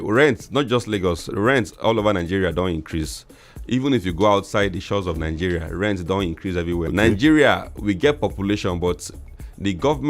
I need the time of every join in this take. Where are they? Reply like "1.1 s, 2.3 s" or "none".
6.9 s